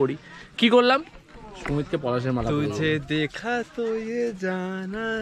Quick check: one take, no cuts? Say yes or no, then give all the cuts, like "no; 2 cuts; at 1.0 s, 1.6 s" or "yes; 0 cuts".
yes; 0 cuts